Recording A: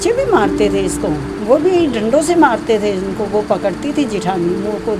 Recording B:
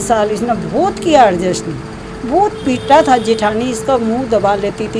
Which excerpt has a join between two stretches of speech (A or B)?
A